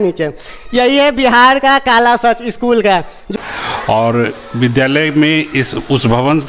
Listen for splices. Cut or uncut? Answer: cut